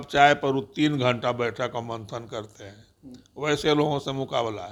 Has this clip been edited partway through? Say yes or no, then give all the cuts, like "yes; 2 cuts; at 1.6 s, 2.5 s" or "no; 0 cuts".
no; 0 cuts